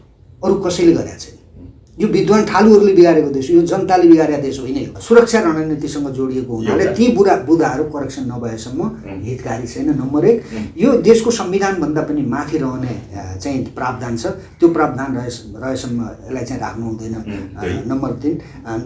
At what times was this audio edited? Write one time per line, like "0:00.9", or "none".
0:04.9